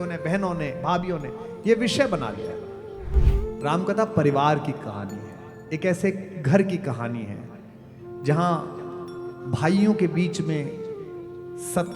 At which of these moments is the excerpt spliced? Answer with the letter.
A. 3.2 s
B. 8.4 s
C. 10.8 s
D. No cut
A